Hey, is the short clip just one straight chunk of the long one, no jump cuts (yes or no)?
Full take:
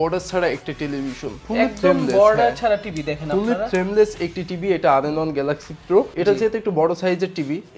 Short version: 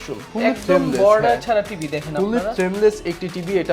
yes